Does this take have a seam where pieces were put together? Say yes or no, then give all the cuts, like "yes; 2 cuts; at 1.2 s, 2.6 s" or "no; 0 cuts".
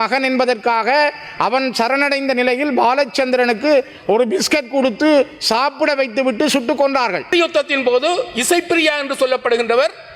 yes; 1 cut; at 7.3 s